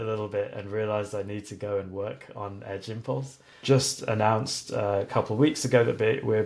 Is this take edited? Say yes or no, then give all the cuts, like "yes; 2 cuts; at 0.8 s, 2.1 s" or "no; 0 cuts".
yes; 1 cut; at 3.6 s